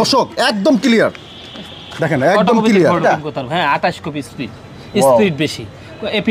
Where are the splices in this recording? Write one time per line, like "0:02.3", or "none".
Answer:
0:03.0